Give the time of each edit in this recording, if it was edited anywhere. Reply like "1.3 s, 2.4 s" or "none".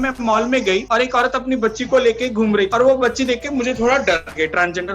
0.8 s, 2.7 s